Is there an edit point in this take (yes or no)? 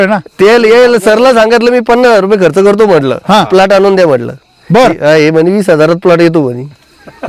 no